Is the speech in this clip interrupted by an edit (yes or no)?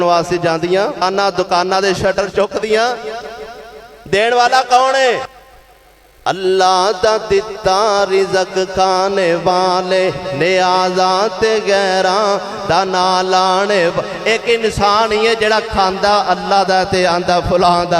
yes